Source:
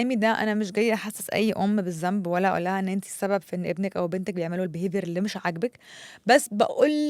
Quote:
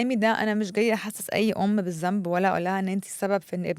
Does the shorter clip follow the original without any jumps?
yes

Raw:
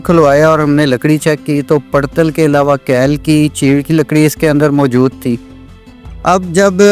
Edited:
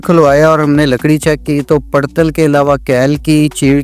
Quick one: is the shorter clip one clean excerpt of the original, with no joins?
yes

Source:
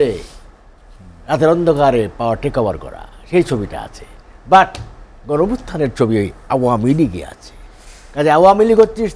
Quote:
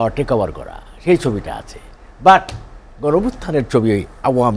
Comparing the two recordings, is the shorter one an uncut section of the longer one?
yes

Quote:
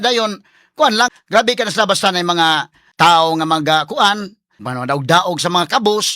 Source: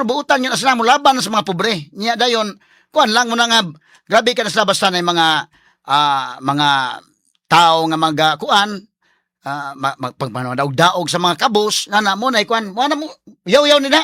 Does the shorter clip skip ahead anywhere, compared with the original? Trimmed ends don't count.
yes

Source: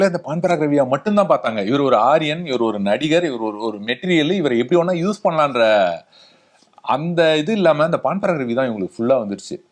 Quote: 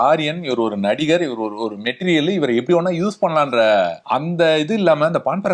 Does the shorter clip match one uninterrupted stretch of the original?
no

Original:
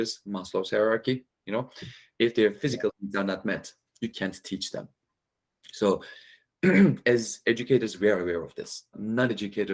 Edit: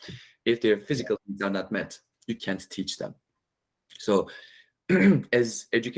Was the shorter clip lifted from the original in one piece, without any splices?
yes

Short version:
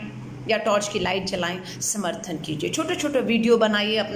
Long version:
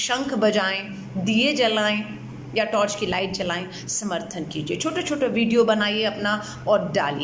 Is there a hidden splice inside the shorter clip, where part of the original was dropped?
no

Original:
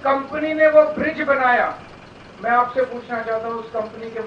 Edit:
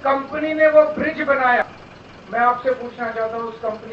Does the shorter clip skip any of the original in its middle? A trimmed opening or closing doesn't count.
yes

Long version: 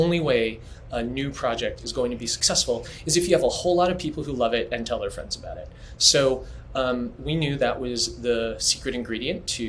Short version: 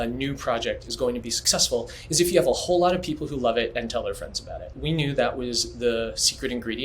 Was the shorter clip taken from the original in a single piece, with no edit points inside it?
no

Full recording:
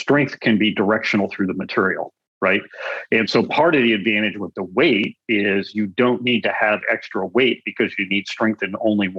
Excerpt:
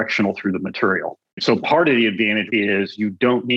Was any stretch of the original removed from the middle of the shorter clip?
yes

